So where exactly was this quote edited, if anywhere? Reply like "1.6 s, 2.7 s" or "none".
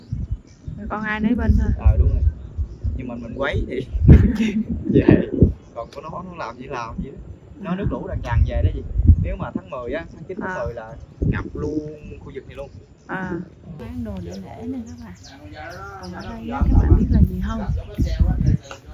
13.8 s